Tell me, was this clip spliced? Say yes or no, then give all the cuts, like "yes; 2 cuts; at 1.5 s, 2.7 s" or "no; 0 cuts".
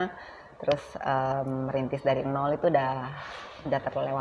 no; 0 cuts